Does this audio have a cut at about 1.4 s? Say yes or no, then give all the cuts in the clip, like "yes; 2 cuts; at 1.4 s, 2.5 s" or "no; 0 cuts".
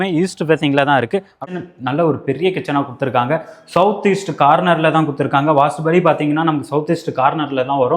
yes; 1 cut; at 1.4 s